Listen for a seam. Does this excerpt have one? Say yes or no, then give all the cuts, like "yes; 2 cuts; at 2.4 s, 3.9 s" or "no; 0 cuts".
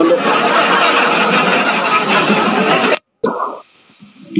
yes; 1 cut; at 3.2 s